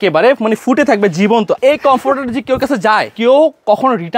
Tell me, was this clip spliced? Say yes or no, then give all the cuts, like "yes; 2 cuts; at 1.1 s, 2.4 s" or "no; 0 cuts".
yes; 2 cuts; at 1.6 s, 3.1 s